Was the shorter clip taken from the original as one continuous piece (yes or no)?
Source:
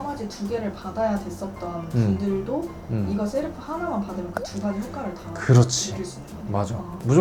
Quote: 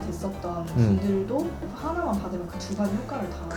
no